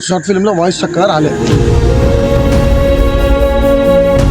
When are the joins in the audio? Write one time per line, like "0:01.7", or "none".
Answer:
0:01.4